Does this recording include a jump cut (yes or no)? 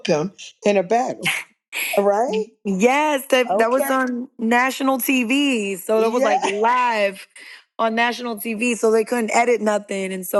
no